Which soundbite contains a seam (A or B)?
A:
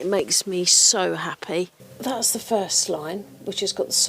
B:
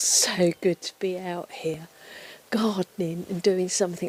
A